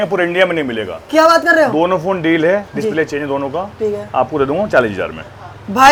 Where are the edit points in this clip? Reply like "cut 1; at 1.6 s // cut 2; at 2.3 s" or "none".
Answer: none